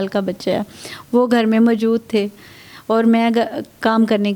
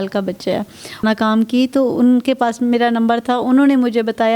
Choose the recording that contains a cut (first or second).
second